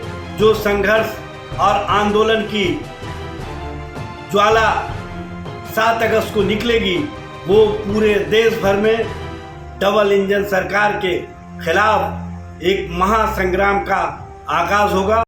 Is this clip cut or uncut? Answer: uncut